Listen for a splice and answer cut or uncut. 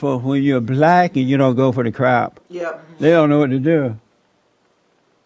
uncut